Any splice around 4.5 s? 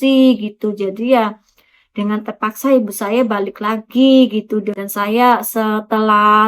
yes; 1 cut; at 4.5 s

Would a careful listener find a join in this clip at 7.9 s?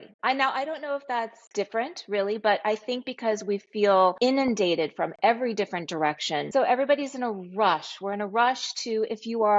no; 2 cuts; at 4.2 s, 6.4 s

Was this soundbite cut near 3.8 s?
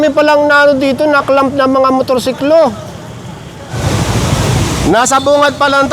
yes; 1 cut; at 3.8 s

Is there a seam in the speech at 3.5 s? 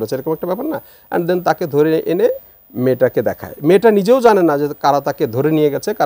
no; 0 cuts

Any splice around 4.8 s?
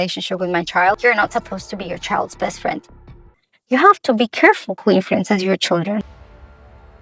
no; 3 cuts; at 1.0 s, 3.4 s, 6.1 s

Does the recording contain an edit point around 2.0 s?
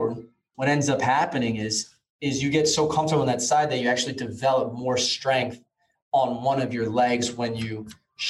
no; 0 cuts

